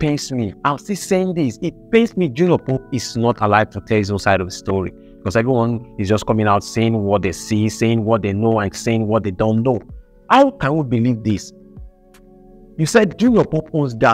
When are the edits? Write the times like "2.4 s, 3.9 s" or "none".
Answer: none